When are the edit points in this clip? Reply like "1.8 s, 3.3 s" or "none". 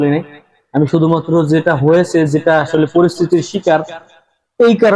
none